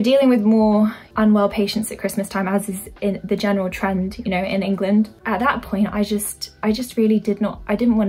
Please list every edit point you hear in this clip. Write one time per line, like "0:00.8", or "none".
0:01.0
0:05.1
0:06.4